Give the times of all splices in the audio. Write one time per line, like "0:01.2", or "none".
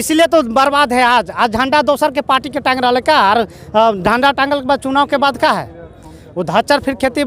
none